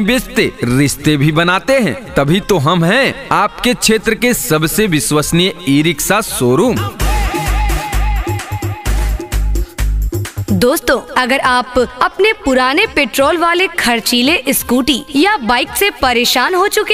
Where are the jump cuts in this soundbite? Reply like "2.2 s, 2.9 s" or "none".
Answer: 6.8 s, 10.4 s